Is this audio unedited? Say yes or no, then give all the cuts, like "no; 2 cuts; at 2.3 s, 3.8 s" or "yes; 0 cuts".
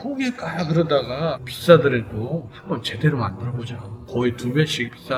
yes; 0 cuts